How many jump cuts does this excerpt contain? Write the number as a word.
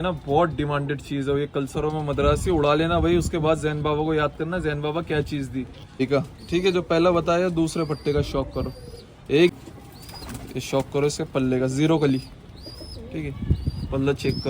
two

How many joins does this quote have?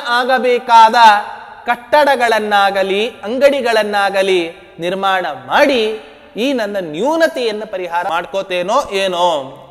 one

